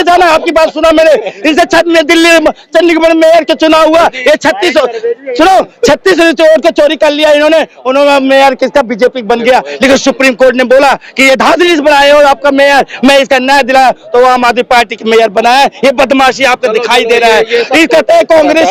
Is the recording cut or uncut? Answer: uncut